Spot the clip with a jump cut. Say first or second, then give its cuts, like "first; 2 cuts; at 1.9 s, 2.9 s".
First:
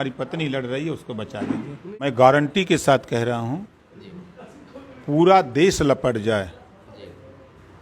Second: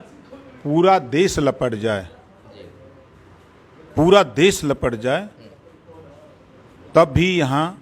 first; 1 cut; at 2.0 s